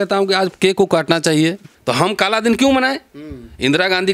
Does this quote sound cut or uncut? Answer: cut